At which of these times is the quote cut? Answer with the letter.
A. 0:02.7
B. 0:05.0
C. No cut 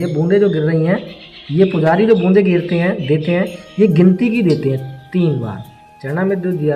C